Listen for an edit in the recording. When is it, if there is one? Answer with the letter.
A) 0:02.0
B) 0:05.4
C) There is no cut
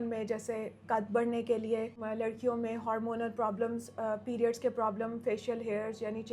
A